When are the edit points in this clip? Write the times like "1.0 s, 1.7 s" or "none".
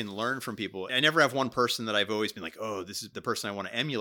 0.9 s, 3.0 s